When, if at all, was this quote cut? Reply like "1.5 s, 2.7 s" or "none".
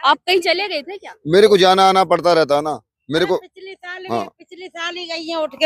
none